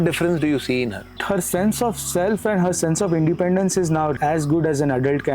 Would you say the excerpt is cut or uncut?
cut